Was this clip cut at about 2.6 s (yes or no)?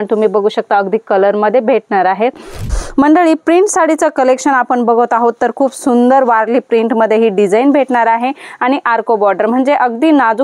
yes